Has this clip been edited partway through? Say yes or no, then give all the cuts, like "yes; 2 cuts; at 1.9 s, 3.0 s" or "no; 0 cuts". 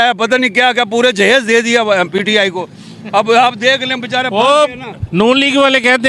no; 0 cuts